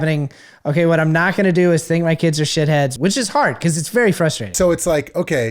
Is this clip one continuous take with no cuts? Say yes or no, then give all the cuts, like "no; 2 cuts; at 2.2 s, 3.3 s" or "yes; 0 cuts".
no; 2 cuts; at 2.9 s, 4.5 s